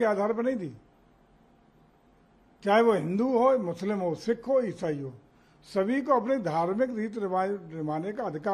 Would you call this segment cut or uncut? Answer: uncut